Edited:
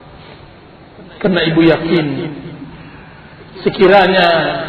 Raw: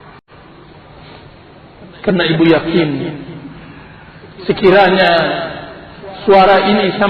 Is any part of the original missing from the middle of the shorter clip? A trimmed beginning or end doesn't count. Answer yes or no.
no